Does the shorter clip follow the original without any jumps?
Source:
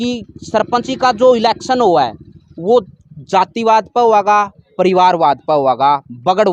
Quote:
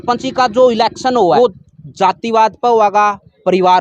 no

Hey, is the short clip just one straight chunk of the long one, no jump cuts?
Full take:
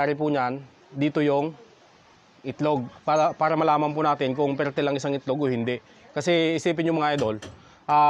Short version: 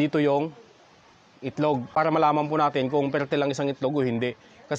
no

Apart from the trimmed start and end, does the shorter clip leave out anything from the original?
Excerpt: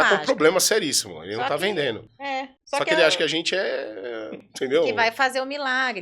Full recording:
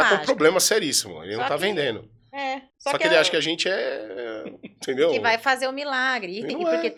yes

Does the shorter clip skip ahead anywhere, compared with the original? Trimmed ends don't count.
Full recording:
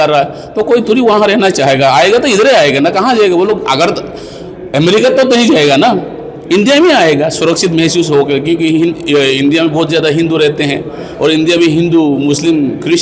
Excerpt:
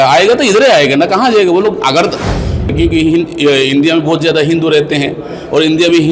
yes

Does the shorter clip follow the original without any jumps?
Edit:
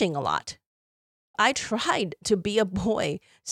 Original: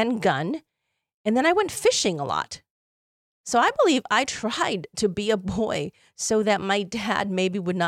no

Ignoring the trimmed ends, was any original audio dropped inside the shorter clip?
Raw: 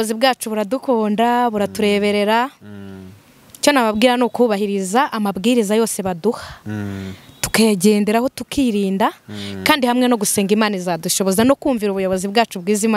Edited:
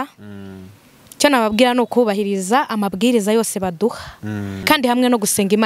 yes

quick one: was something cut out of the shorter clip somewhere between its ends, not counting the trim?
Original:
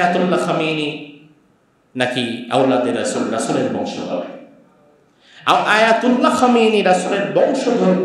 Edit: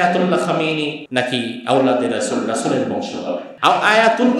yes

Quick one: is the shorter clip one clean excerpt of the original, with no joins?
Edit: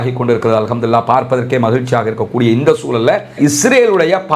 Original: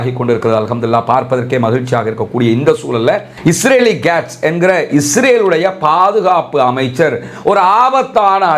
no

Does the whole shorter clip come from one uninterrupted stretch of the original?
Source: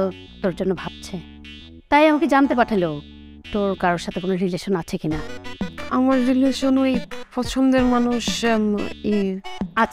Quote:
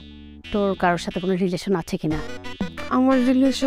yes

